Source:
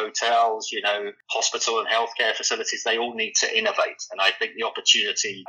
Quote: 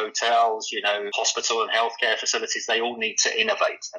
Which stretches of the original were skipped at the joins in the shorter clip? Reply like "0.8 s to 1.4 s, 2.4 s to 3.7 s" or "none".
1.1 s to 1.3 s